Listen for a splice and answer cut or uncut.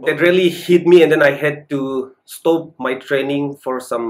uncut